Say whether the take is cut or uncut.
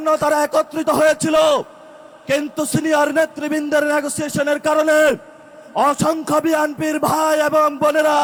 uncut